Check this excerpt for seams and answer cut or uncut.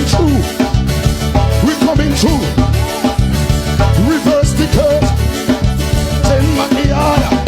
uncut